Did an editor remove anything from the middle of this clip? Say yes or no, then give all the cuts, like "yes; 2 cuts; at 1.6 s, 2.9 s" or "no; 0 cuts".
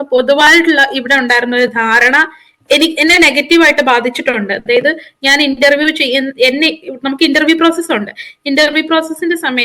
no; 0 cuts